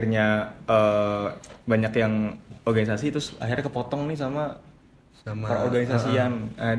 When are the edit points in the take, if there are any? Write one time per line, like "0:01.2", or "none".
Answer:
none